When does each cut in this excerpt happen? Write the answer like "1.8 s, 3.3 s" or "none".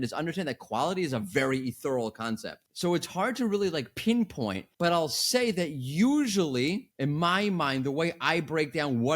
2.6 s, 3.9 s